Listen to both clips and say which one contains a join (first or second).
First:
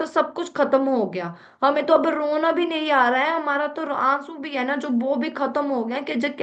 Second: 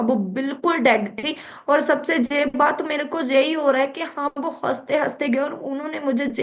second